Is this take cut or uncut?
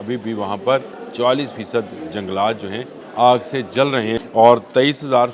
cut